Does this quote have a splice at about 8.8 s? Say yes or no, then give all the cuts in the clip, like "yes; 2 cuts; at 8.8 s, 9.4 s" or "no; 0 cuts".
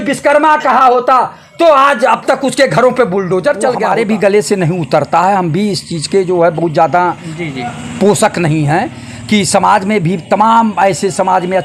no; 1 cut; at 3.8 s